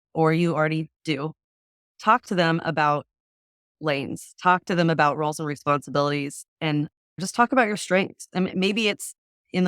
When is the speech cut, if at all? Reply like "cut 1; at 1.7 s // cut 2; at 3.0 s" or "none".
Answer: cut 1; at 1.8 s